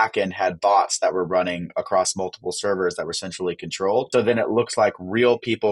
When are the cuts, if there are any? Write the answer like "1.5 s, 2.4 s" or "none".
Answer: 4.1 s